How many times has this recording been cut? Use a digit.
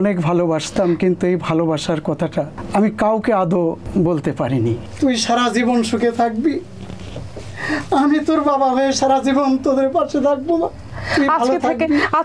4